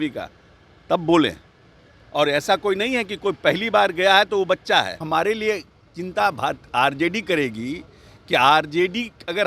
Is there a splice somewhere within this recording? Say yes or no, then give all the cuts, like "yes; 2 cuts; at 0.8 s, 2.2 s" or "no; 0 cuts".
yes; 1 cut; at 5.0 s